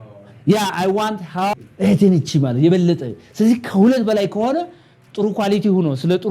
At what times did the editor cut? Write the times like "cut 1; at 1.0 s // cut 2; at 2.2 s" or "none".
cut 1; at 1.5 s